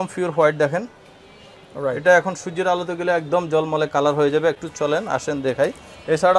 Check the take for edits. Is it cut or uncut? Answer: uncut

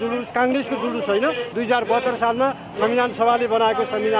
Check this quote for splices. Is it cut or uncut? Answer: uncut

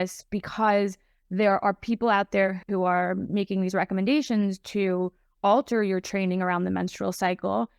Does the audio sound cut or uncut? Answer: uncut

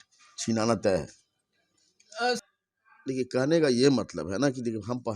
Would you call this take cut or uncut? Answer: cut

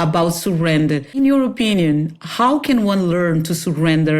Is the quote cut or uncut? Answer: cut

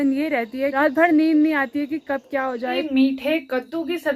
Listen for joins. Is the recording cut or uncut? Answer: cut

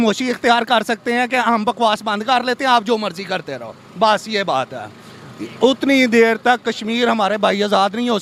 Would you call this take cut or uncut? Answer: uncut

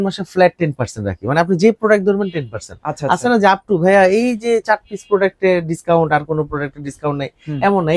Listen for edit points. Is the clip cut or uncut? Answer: uncut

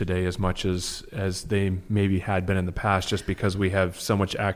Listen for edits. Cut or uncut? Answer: uncut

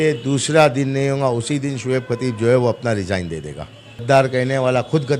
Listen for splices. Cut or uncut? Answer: cut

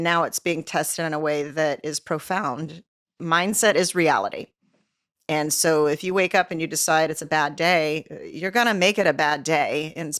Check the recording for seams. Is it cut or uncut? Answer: uncut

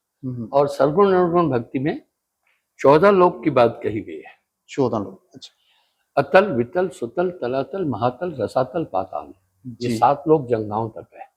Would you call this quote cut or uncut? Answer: uncut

